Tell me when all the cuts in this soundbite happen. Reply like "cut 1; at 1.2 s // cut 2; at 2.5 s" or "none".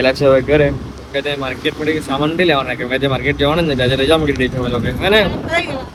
none

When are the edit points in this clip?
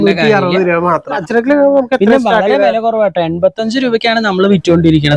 cut 1; at 1.2 s

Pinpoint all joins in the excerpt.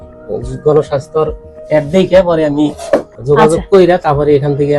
cut 1; at 3.1 s

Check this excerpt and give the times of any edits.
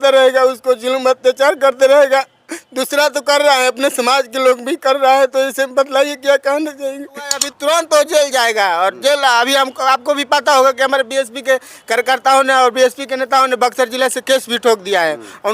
cut 1; at 7.5 s

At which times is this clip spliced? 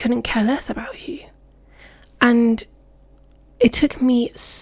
none

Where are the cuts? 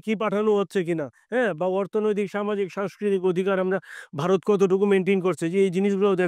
none

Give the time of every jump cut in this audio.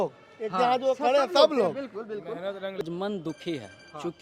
cut 1; at 2.8 s

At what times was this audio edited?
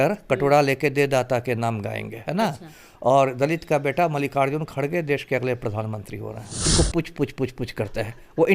cut 1; at 6.7 s

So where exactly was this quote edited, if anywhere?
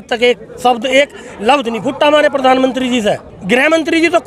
cut 1; at 3.3 s

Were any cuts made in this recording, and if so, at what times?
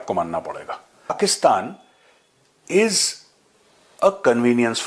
cut 1; at 1.2 s

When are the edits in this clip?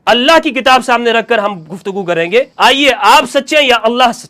cut 1; at 2.5 s

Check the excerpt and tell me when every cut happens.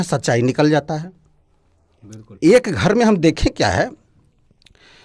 none

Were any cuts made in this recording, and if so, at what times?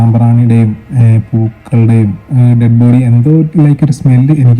none

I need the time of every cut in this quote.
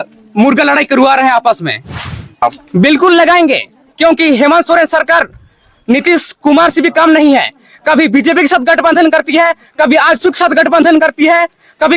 cut 1; at 2.4 s

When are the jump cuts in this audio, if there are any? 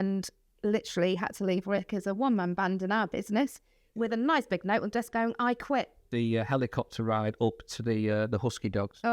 cut 1; at 6.1 s

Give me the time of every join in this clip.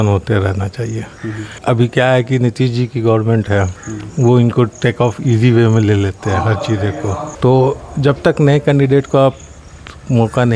cut 1; at 1.5 s // cut 2; at 7.3 s

